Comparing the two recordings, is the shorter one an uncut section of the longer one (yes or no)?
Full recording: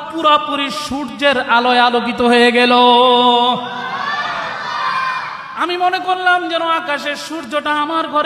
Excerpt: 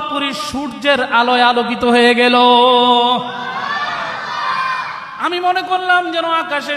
yes